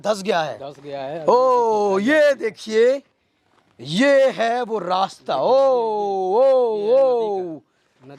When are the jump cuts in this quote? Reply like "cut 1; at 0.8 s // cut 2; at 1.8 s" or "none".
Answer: none